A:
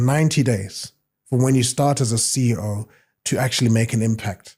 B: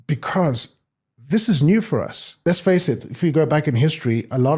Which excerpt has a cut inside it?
B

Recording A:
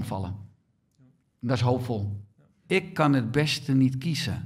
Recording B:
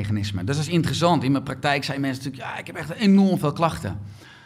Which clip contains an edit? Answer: A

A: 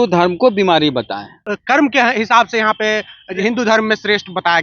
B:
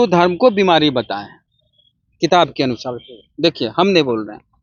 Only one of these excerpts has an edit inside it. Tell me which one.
A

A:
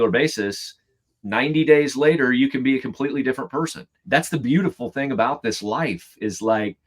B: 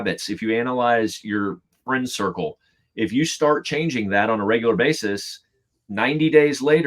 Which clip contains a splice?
A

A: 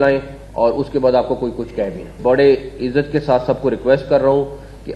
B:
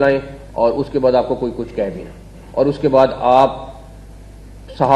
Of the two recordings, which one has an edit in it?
A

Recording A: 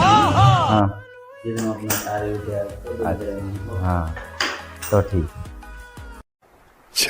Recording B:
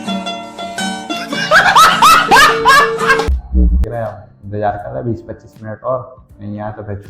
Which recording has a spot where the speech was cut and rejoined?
B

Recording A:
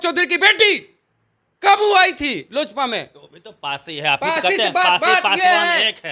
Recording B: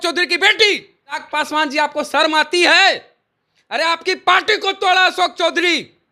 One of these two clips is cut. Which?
B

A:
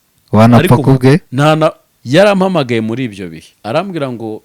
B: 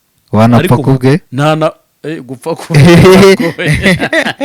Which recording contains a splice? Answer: A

